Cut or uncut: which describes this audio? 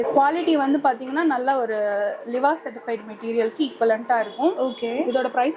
uncut